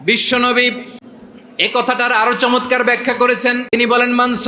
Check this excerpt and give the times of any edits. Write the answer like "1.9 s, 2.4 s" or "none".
1.0 s, 3.7 s

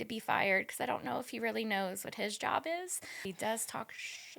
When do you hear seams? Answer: 3.2 s

